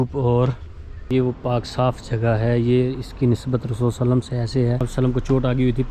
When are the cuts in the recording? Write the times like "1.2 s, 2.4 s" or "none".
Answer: 1.1 s, 4.9 s